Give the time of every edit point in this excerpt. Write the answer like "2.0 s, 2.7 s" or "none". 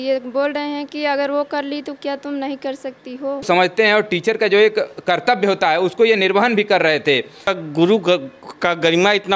3.5 s, 7.5 s